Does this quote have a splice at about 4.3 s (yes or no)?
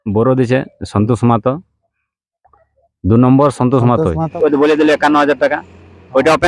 yes